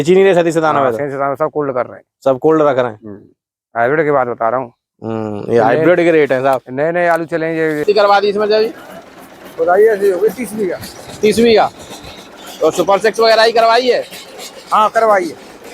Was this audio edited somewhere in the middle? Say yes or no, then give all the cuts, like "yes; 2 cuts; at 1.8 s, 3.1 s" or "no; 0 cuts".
yes; 1 cut; at 7.8 s